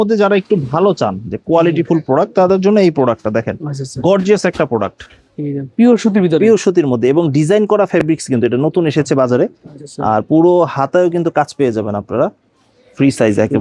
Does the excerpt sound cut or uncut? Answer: uncut